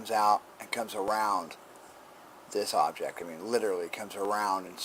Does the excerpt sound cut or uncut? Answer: uncut